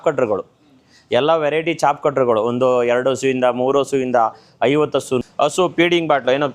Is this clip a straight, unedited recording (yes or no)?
no